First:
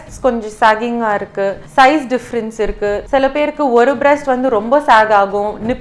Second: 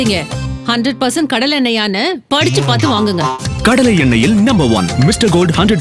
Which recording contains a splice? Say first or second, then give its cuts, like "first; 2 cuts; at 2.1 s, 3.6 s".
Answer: first; 2 cuts; at 1.6 s, 3.0 s